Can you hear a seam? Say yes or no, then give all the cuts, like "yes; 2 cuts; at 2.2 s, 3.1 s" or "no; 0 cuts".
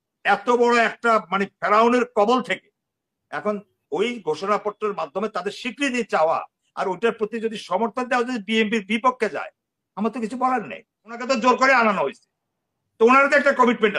yes; 1 cut; at 11.2 s